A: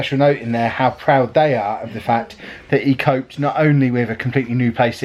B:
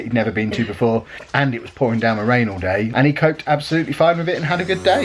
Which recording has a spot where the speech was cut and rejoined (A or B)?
B